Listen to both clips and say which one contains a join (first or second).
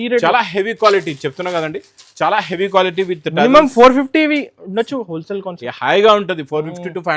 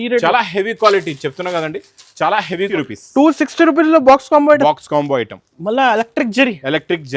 second